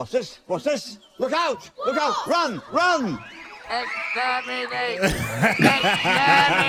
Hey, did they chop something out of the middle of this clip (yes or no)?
no